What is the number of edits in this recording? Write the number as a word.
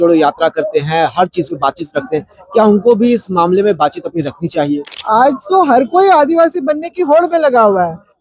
one